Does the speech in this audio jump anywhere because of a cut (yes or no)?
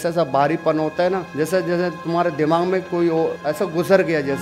yes